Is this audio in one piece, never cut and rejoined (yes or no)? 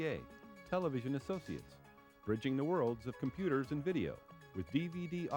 yes